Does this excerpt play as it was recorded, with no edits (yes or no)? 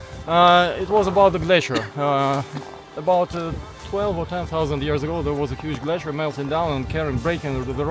yes